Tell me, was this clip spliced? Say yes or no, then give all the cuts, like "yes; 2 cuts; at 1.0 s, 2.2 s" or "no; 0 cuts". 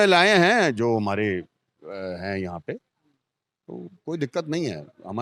no; 0 cuts